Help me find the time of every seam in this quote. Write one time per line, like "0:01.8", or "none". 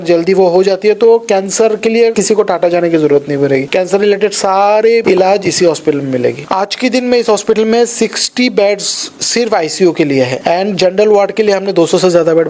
0:02.2
0:03.7
0:05.0
0:06.4
0:10.4